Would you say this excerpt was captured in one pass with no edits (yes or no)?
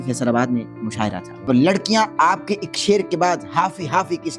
no